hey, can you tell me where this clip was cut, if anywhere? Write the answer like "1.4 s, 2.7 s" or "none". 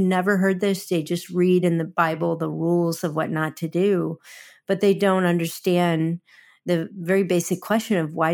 1.9 s